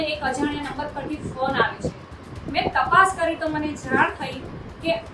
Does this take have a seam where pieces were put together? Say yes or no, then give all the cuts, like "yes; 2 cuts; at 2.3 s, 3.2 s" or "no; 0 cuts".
no; 0 cuts